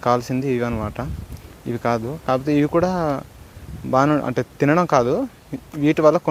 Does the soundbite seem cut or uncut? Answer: uncut